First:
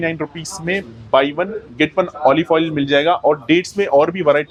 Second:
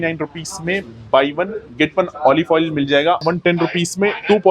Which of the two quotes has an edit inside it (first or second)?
second